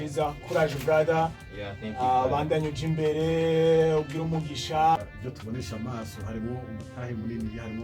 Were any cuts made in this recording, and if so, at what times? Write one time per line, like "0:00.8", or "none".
0:05.0

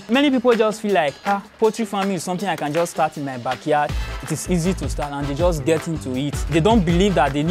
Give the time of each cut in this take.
0:01.2
0:06.4

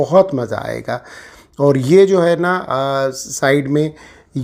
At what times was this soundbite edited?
none

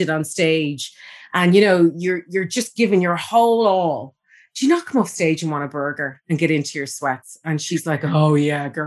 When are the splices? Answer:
none

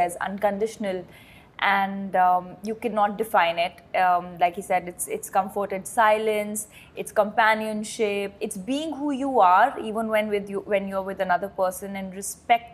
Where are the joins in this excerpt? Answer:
none

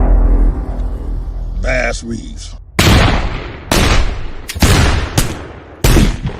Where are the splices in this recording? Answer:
0:01.3

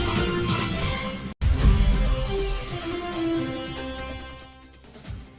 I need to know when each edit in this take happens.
0:01.3
0:02.7

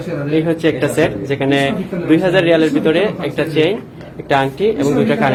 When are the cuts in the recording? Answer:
none

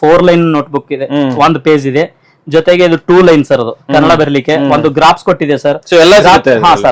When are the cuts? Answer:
none

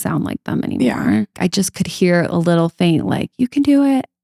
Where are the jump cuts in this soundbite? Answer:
0:01.3

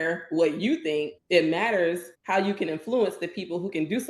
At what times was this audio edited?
0:01.2
0:02.1

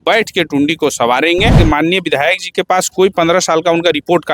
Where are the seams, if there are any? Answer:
0:01.6

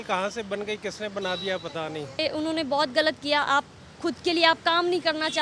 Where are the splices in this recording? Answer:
none

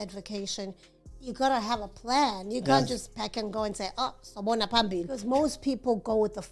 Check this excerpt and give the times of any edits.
0:05.1

